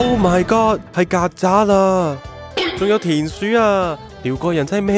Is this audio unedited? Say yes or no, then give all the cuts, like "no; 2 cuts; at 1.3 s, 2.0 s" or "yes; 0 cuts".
yes; 0 cuts